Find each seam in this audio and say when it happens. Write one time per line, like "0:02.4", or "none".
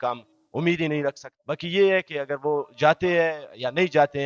none